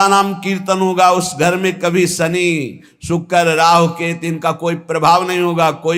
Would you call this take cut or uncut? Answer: uncut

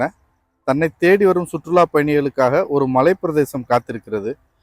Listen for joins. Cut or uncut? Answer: uncut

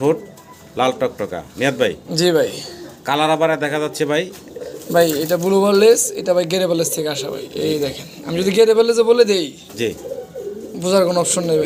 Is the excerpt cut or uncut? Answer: uncut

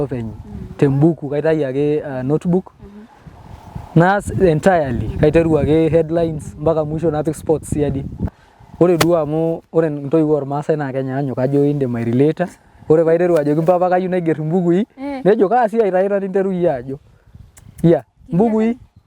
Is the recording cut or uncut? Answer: cut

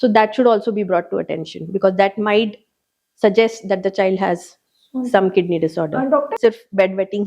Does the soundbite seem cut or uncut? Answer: cut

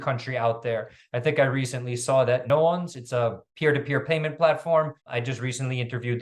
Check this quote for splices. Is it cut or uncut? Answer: cut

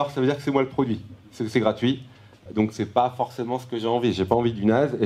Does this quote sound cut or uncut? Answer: uncut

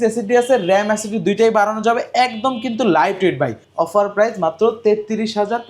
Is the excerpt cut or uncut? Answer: cut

